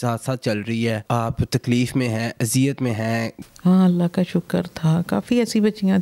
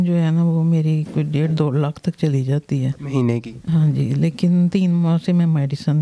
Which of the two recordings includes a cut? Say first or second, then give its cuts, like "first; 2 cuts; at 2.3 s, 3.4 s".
first; 2 cuts; at 1.0 s, 3.3 s